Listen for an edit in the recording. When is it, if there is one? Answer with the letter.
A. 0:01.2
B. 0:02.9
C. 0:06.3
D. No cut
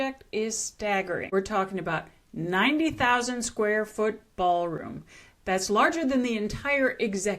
A